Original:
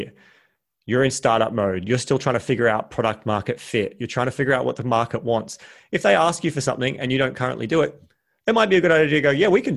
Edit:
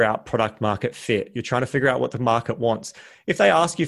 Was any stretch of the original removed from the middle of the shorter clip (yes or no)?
no